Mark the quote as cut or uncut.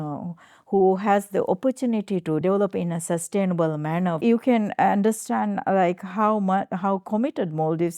cut